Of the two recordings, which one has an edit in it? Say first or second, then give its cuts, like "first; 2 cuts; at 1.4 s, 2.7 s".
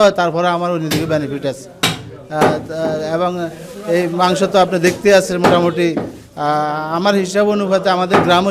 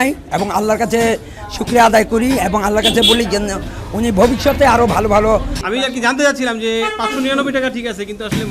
second; 1 cut; at 5.6 s